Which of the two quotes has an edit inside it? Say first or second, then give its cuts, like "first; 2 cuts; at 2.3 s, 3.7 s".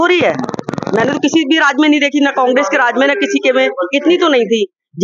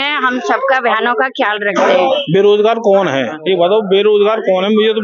second; 2 cuts; at 2.1 s, 3.4 s